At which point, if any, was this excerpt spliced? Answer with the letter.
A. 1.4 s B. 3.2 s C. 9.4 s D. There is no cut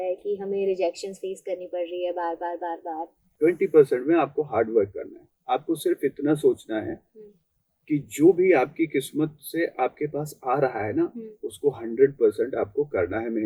B